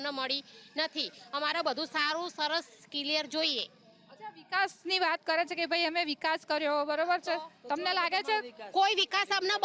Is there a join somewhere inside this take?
no; 0 cuts

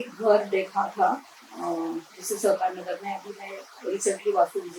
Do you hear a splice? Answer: no; 0 cuts

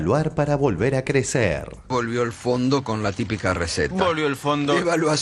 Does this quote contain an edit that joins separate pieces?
yes; 1 cut; at 1.8 s

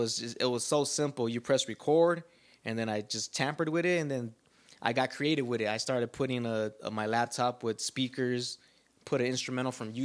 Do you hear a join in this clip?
no; 0 cuts

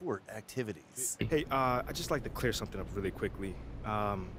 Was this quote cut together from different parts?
yes; 1 cut; at 1.2 s

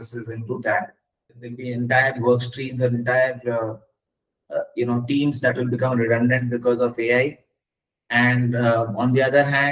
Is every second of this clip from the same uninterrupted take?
no; 1 cut; at 1.6 s

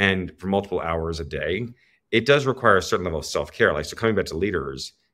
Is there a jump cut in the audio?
no; 0 cuts

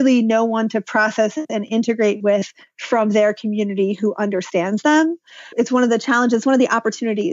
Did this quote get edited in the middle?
yes; 1 cut; at 5.4 s

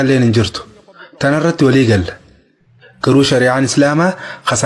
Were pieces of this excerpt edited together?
no; 0 cuts

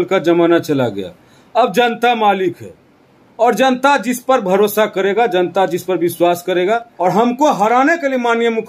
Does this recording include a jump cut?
yes; 1 cut; at 6.9 s

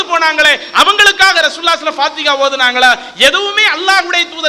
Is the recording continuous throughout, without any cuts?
yes; 0 cuts

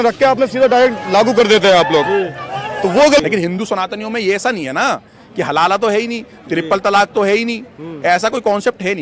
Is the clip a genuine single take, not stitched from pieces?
no; 1 cut; at 3.2 s

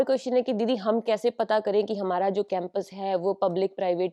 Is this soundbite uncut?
yes; 0 cuts

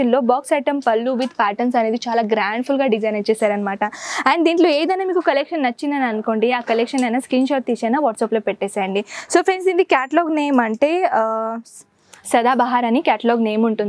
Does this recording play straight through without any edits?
yes; 0 cuts

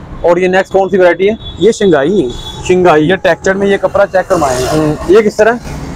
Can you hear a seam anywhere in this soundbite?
no; 0 cuts

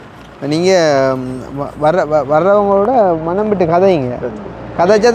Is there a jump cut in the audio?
no; 0 cuts

